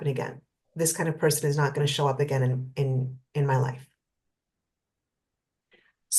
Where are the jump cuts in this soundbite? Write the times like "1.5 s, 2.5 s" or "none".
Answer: none